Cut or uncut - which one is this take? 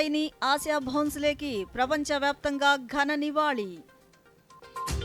uncut